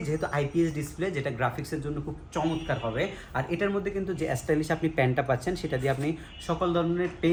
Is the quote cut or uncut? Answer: uncut